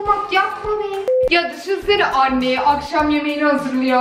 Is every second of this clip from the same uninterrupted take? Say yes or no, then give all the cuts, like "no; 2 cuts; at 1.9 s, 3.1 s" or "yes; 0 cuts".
no; 1 cut; at 1.1 s